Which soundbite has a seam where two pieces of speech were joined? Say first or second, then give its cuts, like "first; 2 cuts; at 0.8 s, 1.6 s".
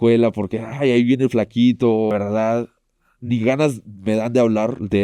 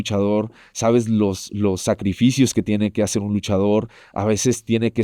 first; 1 cut; at 2.1 s